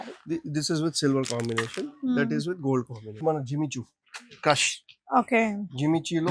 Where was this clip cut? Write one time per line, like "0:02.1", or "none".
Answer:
0:03.2

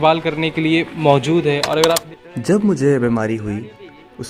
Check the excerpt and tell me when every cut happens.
0:02.0

